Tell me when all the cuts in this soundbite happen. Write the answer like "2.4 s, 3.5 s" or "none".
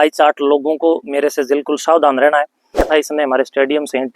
2.9 s

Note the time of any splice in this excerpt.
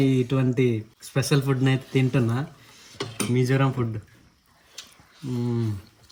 none

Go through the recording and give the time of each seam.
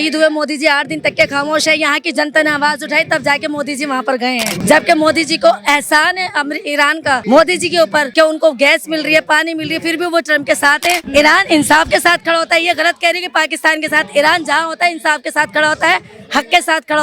4.5 s, 7.2 s, 8.1 s, 11.0 s

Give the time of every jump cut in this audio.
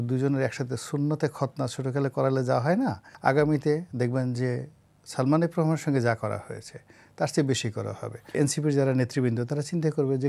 3.1 s, 8.2 s

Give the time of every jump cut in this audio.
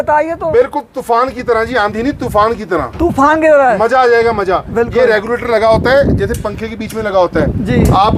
none

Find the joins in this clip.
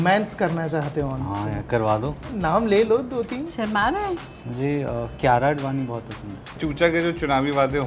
2.2 s, 6.5 s

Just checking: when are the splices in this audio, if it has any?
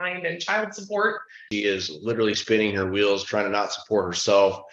1.4 s

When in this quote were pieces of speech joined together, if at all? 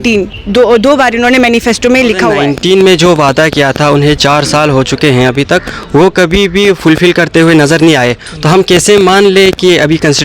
2.5 s

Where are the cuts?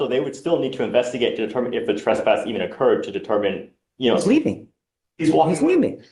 none

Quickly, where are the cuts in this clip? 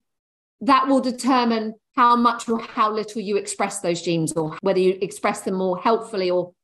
1.8 s, 4.5 s

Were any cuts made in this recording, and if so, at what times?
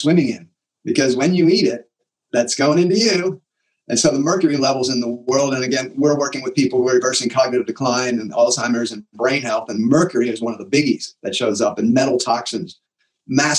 none

